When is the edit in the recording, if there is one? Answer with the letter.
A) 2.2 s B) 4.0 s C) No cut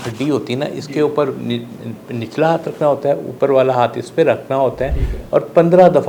C